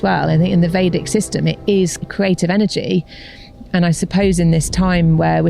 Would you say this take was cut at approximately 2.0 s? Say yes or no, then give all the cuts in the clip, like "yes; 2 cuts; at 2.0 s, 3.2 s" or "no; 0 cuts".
yes; 1 cut; at 2.0 s